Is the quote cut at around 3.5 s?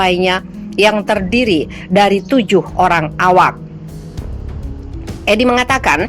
yes; 2 cuts; at 3.5 s, 5.2 s

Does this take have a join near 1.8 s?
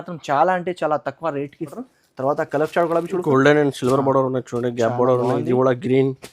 yes; 1 cut; at 1.8 s

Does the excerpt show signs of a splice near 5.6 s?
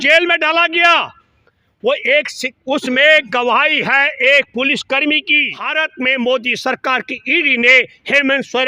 yes; 1 cut; at 5.6 s

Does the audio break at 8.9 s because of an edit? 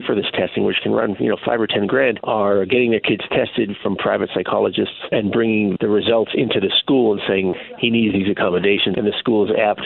yes; 3 cuts; at 5.0 s, 7.5 s, 8.9 s

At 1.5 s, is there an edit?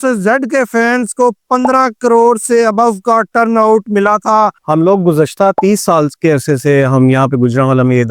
no; 1 cut; at 4.6 s

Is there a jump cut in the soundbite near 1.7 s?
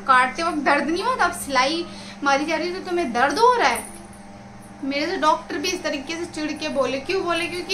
no; 0 cuts

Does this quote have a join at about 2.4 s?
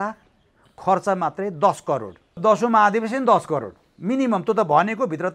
yes; 1 cut; at 2.4 s

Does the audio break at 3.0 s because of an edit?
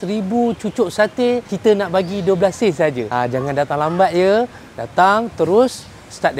no; 0 cuts

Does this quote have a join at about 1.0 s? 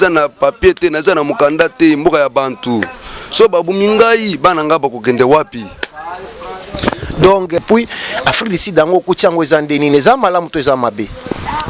no; 1 cut; at 7.6 s

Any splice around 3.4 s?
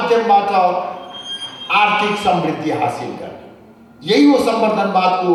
no; 0 cuts

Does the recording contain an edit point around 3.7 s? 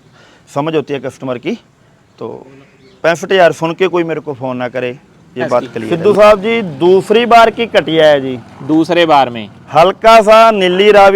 no; 1 cut; at 5.8 s

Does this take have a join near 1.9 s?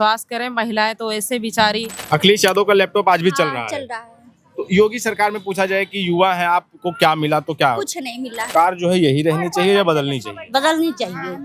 yes; 2 cuts; at 1.9 s, 8.5 s

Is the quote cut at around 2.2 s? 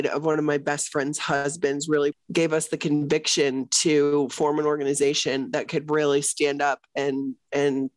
yes; 1 cut; at 2.2 s

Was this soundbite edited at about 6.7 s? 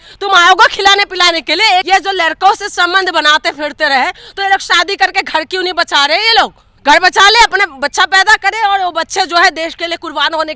yes; 2 cuts; at 1.9 s, 6.7 s

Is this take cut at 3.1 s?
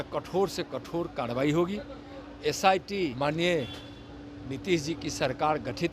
yes; 1 cut; at 3.1 s

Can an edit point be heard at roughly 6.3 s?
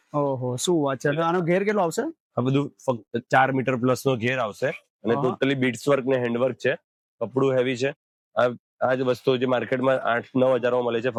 no; 0 cuts

